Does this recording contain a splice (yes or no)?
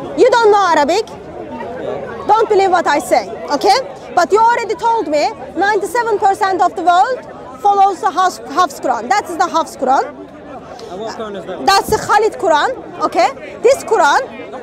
no